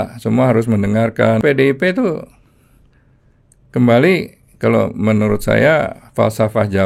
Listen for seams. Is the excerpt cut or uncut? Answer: cut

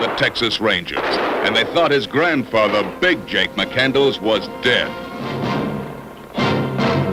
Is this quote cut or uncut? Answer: uncut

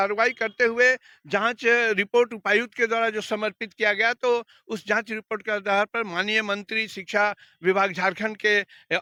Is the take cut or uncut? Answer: uncut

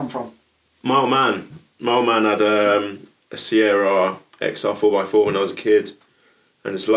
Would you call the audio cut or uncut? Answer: uncut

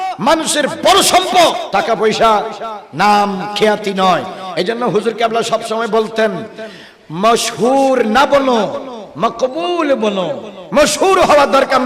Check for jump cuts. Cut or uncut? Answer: cut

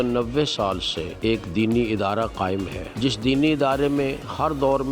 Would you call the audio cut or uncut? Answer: cut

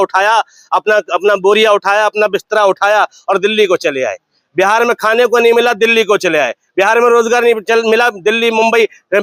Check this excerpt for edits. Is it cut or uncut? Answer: uncut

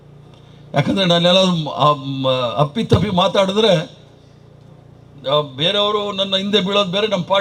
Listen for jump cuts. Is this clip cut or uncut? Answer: uncut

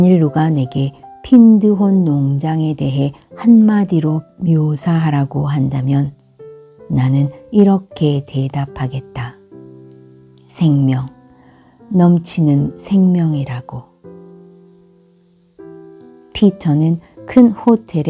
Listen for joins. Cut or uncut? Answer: cut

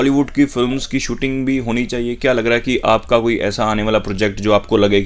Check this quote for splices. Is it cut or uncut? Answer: uncut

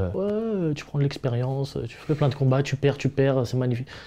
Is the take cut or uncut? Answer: uncut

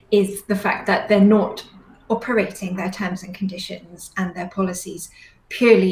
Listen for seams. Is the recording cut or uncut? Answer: uncut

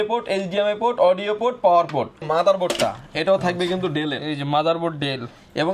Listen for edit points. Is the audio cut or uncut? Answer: cut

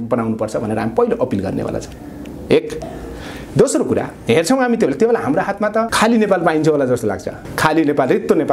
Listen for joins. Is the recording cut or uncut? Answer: uncut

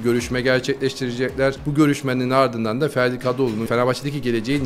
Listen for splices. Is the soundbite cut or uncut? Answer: cut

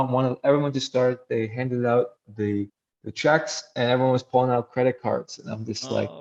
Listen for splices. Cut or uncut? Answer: uncut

